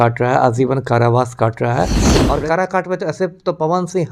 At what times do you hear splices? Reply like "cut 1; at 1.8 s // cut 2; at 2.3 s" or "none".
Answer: cut 1; at 2.1 s